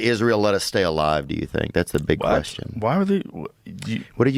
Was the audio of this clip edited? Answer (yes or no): no